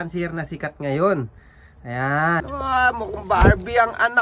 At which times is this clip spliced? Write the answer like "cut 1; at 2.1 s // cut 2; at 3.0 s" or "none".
cut 1; at 2.4 s